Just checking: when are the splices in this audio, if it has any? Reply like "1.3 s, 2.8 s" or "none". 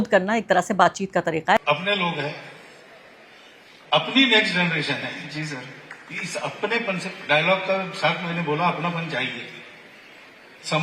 1.6 s